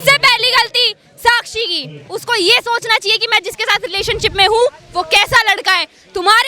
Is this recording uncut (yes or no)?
no